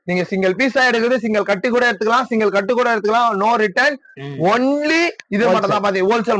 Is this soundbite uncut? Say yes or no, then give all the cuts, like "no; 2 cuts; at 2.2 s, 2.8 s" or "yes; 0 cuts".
yes; 0 cuts